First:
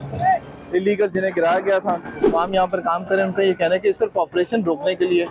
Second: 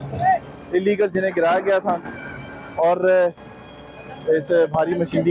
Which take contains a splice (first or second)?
first